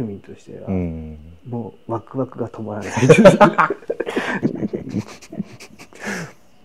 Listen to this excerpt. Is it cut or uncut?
cut